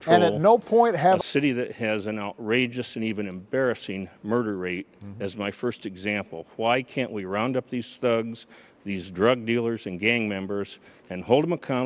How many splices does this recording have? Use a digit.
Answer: 1